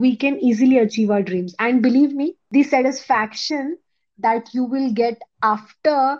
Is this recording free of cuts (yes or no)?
no